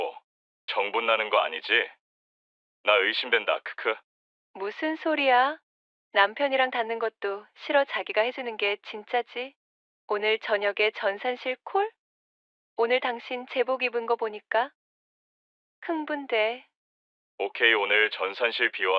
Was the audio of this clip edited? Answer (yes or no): no